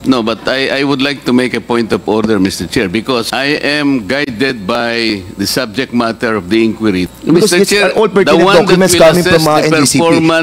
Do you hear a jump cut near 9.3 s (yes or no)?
no